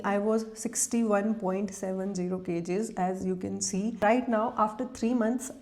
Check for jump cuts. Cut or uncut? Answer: cut